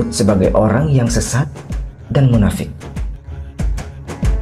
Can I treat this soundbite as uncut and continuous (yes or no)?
yes